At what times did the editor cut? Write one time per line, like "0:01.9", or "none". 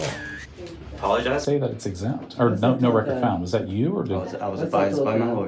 0:01.4